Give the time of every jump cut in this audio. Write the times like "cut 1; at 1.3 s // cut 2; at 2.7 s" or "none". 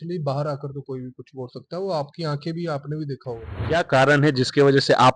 cut 1; at 3.5 s